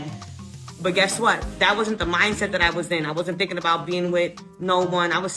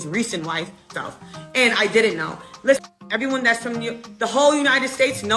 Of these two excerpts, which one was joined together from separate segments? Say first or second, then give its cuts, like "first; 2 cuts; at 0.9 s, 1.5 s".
second; 2 cuts; at 0.9 s, 2.8 s